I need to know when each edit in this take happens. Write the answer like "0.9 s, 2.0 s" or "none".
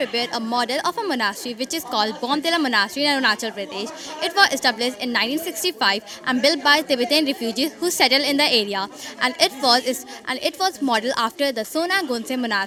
none